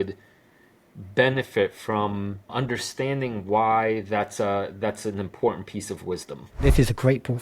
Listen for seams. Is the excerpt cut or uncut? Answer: cut